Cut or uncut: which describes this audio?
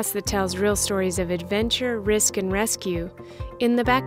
uncut